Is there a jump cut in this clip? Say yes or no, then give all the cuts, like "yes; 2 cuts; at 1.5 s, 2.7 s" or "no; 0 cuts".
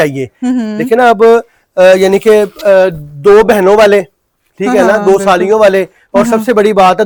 no; 0 cuts